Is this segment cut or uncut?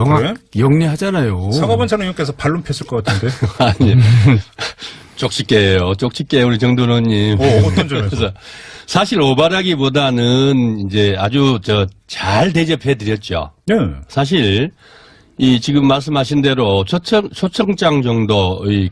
cut